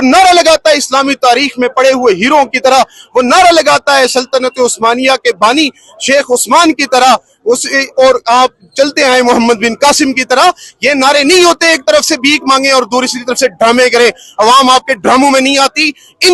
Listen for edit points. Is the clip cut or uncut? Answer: uncut